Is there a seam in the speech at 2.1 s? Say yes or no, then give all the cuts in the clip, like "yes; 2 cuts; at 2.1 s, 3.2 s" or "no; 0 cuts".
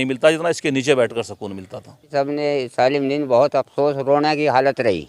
yes; 1 cut; at 2.1 s